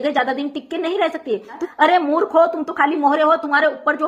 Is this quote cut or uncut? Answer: cut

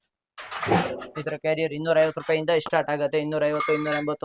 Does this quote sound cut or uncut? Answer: uncut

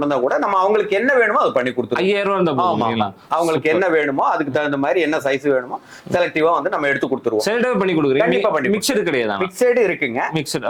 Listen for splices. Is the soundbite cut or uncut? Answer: uncut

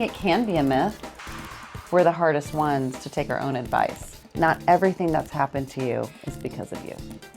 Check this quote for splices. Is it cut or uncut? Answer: cut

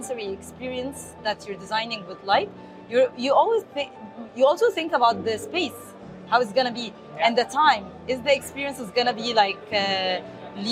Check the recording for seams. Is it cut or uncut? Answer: uncut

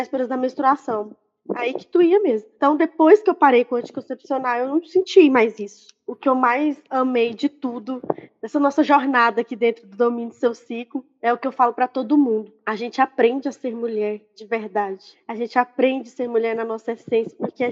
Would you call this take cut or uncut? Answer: uncut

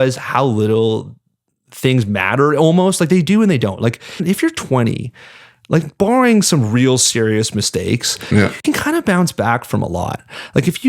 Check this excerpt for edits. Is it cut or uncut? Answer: cut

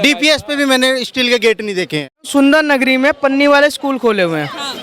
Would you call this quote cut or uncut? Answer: cut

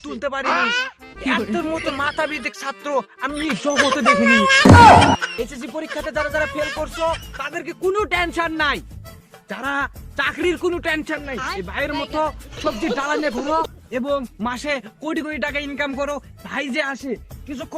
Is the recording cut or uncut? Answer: cut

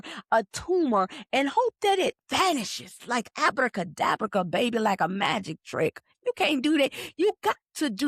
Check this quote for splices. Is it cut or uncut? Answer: uncut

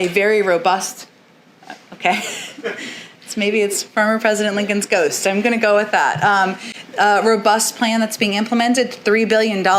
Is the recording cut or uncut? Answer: uncut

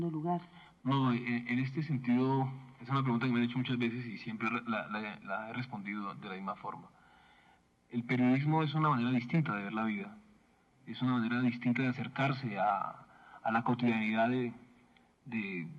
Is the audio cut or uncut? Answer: uncut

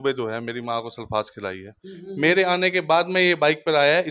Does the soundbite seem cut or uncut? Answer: cut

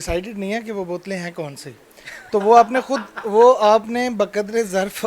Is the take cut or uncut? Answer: uncut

